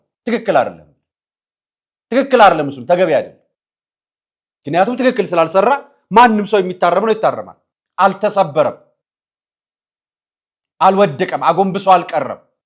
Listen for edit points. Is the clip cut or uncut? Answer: uncut